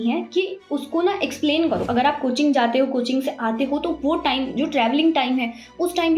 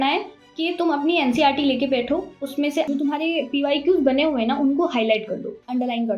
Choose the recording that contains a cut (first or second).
first